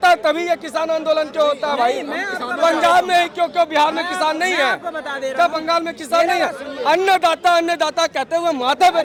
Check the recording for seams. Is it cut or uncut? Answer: uncut